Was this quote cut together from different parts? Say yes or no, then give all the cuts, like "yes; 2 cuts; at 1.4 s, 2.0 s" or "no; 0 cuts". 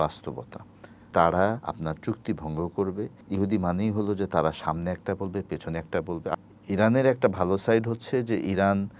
yes; 4 cuts; at 1.1 s, 1.7 s, 3.2 s, 6.4 s